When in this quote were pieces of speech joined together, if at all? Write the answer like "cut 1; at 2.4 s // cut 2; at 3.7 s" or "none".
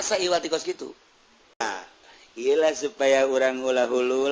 cut 1; at 1.6 s